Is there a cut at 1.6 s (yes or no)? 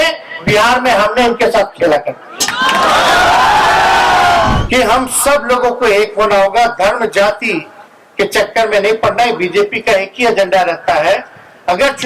no